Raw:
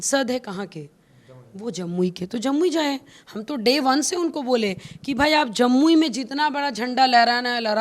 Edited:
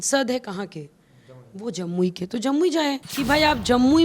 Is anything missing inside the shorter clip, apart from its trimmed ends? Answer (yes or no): yes